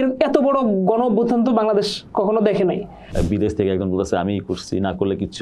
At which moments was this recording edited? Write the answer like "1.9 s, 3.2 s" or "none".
3.0 s